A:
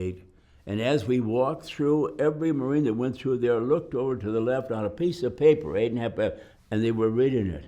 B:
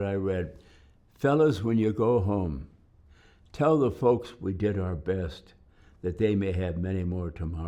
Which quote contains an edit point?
A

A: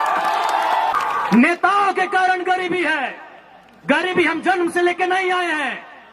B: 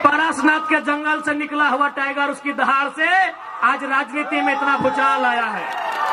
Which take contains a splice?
A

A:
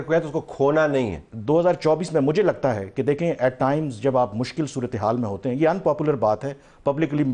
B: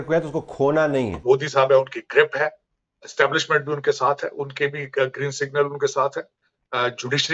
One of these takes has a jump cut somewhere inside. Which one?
B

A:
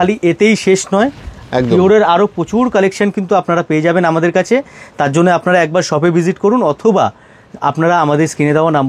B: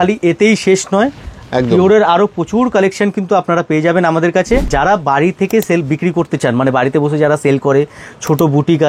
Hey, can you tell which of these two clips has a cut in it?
B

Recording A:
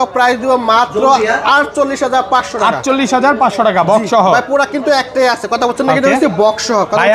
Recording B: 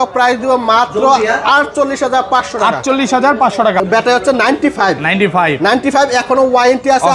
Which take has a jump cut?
B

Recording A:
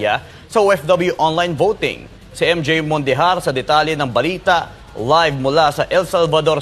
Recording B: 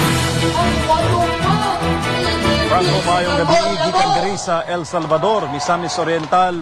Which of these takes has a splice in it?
B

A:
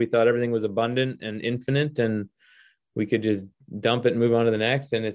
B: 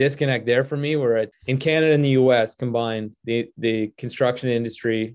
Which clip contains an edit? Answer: B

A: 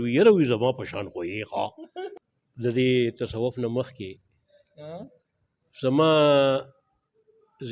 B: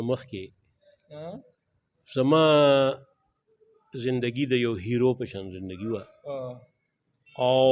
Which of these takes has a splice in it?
A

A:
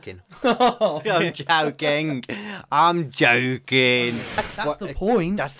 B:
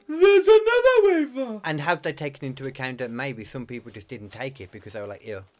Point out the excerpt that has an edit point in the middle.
A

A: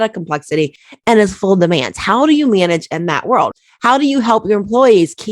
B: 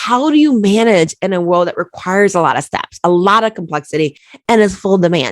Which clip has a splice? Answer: A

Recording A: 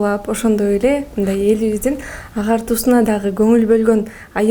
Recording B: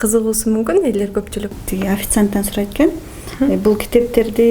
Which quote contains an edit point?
B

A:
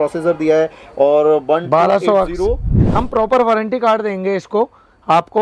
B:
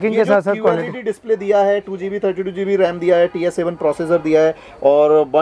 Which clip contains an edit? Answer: A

